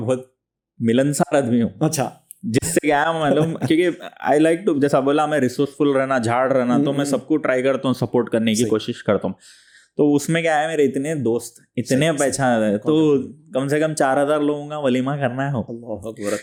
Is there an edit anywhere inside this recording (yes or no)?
no